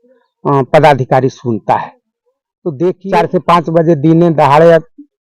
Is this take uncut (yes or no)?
no